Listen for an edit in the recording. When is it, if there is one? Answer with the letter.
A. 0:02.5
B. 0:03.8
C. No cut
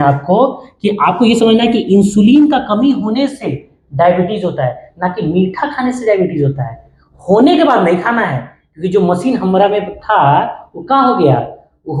C